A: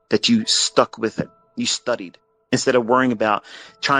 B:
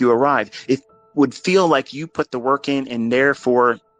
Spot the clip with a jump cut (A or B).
A